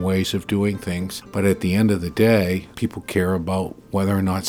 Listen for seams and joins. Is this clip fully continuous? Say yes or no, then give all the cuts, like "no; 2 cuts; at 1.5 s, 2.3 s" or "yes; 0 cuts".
no; 2 cuts; at 1.2 s, 2.7 s